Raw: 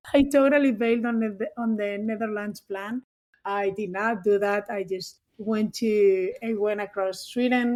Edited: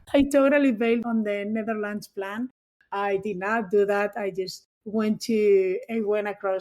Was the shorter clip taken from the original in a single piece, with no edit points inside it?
no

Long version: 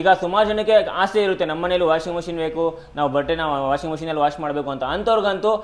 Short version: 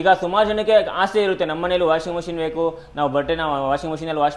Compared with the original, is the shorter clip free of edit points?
yes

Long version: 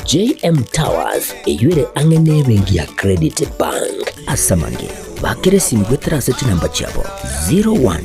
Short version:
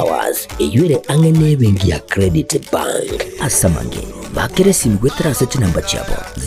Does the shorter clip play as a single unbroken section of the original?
yes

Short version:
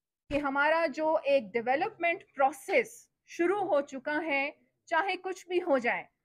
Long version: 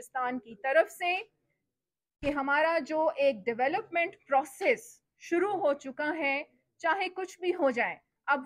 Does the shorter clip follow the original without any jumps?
yes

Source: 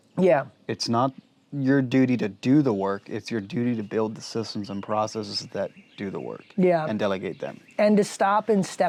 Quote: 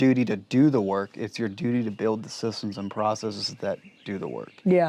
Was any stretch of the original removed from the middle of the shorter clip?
no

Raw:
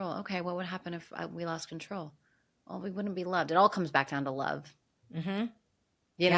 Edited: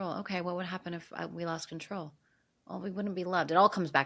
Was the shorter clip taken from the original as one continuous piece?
yes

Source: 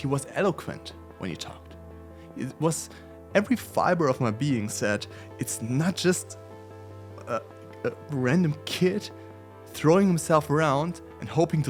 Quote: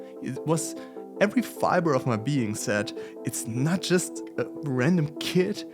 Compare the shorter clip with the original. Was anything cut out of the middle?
yes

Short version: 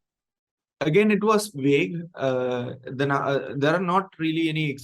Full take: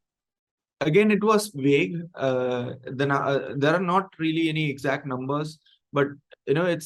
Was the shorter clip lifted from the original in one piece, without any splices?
yes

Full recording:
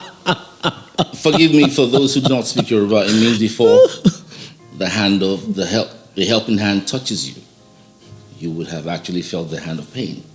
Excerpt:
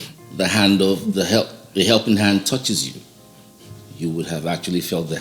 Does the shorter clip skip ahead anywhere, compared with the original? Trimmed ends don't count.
no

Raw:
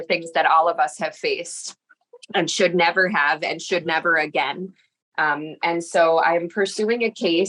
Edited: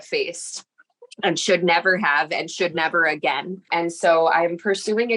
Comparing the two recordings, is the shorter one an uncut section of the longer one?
no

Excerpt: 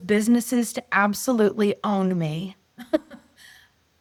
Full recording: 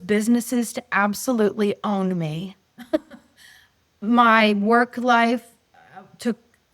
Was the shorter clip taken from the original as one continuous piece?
yes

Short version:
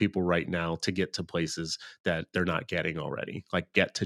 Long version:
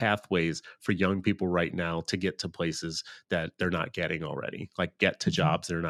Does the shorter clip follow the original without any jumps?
yes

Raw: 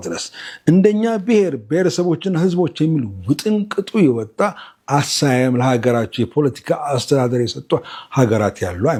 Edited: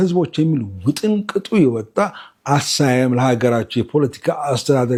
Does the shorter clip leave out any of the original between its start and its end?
no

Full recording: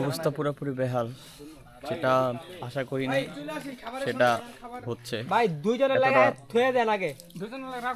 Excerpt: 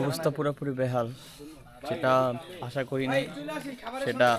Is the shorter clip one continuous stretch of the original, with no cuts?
yes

